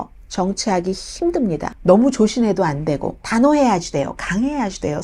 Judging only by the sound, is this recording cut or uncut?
cut